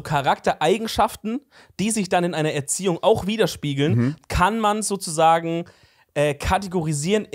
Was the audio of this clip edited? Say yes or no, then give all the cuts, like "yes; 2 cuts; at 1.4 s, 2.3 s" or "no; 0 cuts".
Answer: no; 0 cuts